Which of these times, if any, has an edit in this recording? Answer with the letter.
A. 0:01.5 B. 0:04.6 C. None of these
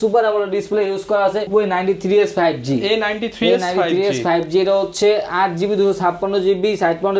A